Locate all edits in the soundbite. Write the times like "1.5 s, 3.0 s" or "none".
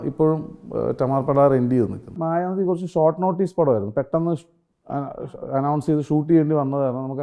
2.1 s